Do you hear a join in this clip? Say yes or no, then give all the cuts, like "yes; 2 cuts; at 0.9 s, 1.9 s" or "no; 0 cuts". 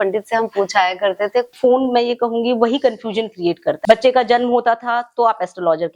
yes; 2 cuts; at 1.5 s, 3.8 s